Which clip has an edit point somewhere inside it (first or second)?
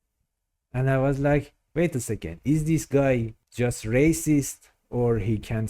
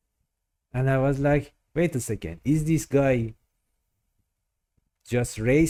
first